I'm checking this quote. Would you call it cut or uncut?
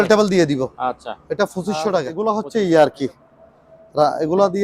cut